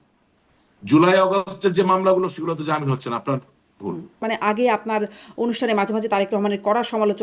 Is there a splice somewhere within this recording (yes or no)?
yes